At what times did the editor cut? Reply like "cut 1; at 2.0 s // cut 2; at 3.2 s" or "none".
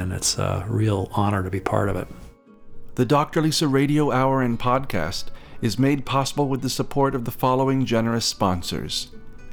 cut 1; at 3.0 s